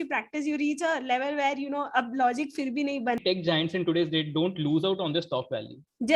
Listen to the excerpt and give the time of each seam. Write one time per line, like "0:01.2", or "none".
0:03.2